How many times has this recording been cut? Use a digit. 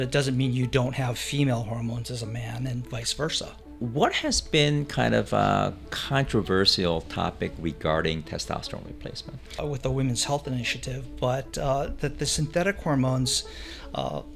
2